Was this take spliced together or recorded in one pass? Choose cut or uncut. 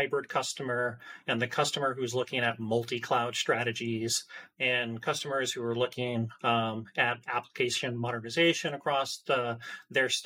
uncut